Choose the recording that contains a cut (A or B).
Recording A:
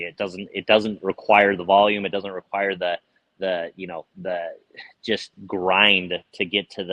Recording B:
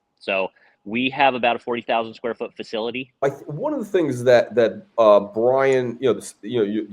B